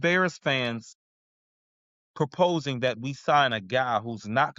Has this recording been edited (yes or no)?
no